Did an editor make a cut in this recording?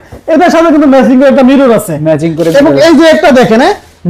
no; 0 cuts

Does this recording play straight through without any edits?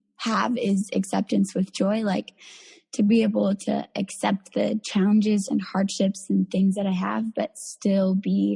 yes; 0 cuts

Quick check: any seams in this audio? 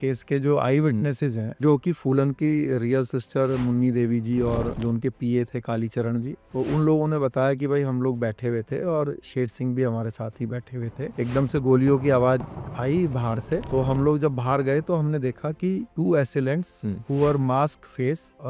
no; 0 cuts

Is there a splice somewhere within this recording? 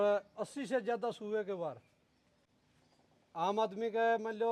no; 0 cuts

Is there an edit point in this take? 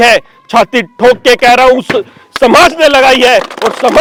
no; 0 cuts

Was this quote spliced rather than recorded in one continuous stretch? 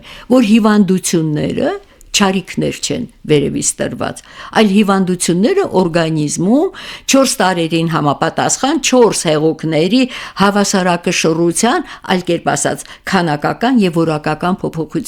no; 0 cuts

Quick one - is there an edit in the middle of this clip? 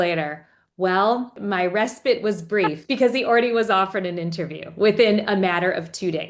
yes; 2 cuts; at 1.4 s, 2.8 s

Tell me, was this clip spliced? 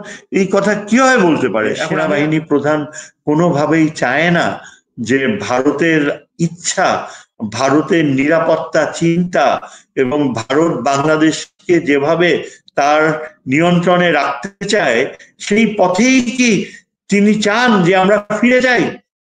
yes; 1 cut; at 1.9 s

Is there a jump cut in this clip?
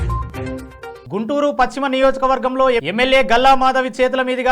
yes; 1 cut; at 1.0 s

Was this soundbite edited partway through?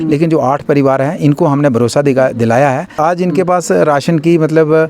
yes; 1 cut; at 3.0 s

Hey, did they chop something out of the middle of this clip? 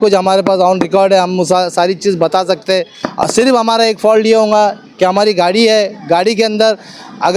yes; 1 cut; at 3.0 s

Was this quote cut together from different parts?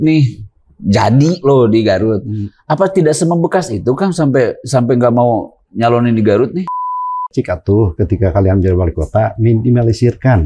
yes; 1 cut; at 6.8 s

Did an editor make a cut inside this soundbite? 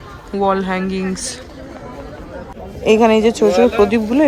yes; 1 cut; at 2.6 s

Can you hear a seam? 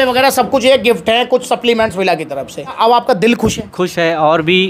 yes; 1 cut; at 2.7 s

